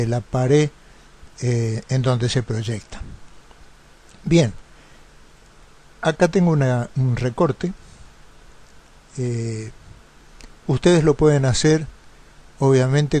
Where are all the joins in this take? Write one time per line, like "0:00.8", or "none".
0:03.2